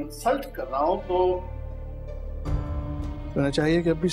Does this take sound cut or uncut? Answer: uncut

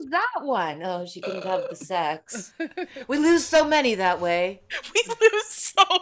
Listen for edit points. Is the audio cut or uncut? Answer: uncut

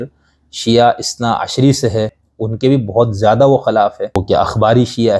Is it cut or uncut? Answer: cut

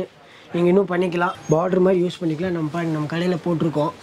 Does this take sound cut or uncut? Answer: cut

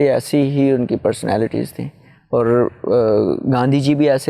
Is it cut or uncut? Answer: uncut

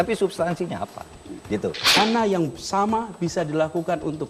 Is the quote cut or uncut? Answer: cut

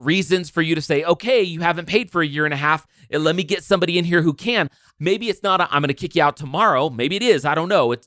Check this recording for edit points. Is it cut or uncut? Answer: cut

